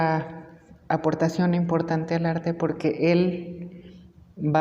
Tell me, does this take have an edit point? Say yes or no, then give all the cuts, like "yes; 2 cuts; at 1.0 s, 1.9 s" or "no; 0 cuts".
no; 0 cuts